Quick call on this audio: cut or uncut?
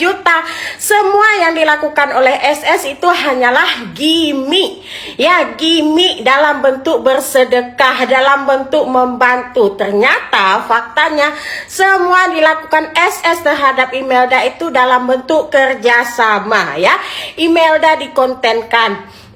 uncut